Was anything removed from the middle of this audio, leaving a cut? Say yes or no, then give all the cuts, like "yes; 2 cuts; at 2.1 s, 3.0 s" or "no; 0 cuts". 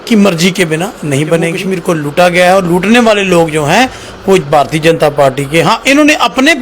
yes; 1 cut; at 1.6 s